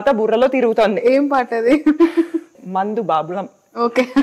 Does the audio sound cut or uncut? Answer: cut